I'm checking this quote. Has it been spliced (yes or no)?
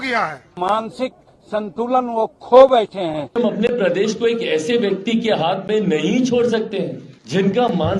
yes